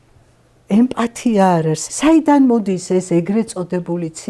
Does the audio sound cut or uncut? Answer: cut